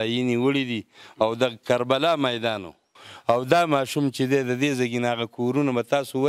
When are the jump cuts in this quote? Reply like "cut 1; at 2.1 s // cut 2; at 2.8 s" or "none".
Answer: cut 1; at 3.0 s